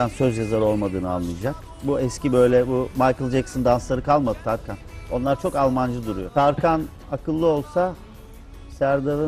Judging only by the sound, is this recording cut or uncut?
cut